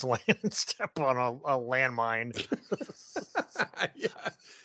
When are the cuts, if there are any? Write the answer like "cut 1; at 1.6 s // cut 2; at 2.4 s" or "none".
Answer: none